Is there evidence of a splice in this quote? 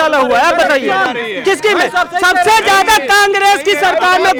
no; 0 cuts

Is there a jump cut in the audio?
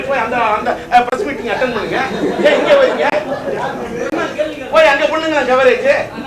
no; 0 cuts

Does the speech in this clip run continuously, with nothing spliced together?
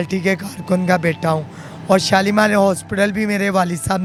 yes; 0 cuts

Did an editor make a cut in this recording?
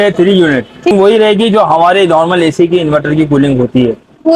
yes; 1 cut; at 0.9 s

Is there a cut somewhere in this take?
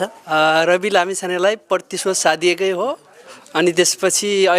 no; 0 cuts

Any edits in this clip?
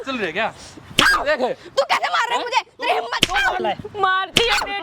yes; 1 cut; at 3.6 s

